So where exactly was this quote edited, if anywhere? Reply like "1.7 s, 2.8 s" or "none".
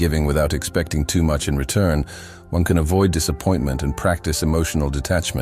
0.9 s